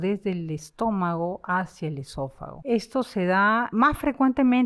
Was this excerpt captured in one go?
no; 2 cuts; at 2.5 s, 3.7 s

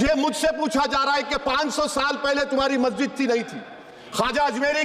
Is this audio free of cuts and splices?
yes; 0 cuts

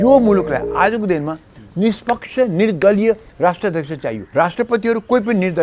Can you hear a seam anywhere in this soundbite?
yes; 1 cut; at 4.2 s

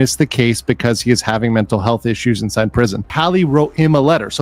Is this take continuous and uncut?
no; 1 cut; at 3.1 s

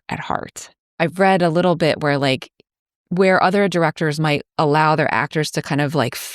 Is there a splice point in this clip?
no; 0 cuts

